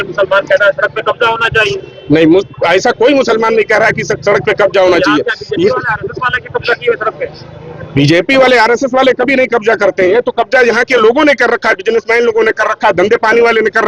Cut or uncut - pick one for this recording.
uncut